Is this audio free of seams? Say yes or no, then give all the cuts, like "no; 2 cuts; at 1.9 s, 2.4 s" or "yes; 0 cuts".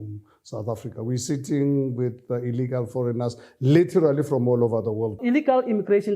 no; 1 cut; at 5.2 s